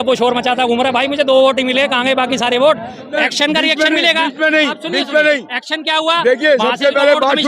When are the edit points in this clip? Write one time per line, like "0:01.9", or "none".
0:03.1